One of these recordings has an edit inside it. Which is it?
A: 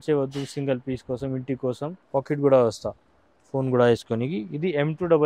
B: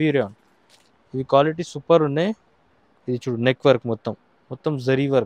A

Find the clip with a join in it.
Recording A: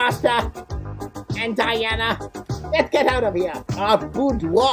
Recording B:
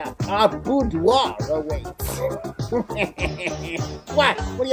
A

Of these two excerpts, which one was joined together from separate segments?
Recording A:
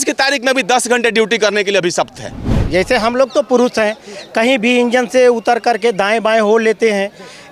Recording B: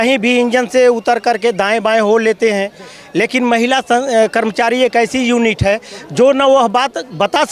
A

